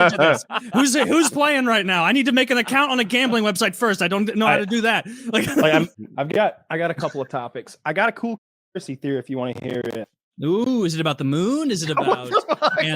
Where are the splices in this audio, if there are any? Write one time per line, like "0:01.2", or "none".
0:05.9